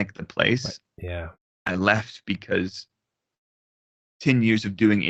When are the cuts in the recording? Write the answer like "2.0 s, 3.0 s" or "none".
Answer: none